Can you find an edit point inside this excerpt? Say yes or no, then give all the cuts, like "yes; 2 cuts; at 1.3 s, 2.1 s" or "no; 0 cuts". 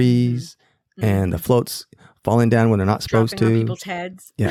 no; 0 cuts